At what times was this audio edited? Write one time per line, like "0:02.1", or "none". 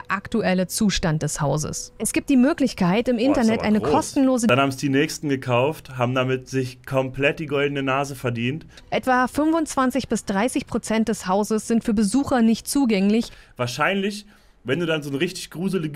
0:04.5
0:08.7